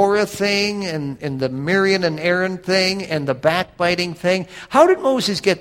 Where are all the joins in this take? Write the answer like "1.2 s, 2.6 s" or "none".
1.1 s